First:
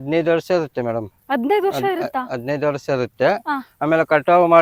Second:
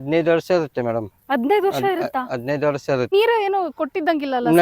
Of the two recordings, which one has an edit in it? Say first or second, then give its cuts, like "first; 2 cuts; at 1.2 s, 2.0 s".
second; 1 cut; at 3.1 s